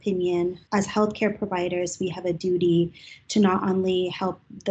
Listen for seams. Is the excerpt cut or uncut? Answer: uncut